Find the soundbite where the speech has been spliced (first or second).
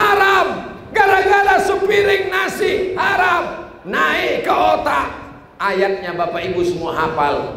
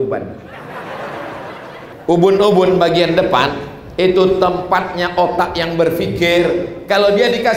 second